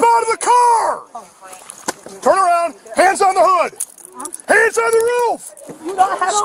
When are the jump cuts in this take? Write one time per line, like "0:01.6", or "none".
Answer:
none